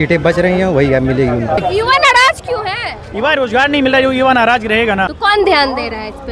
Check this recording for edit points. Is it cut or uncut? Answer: cut